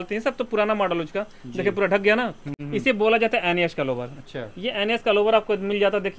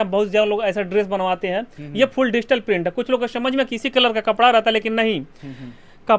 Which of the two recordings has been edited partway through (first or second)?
first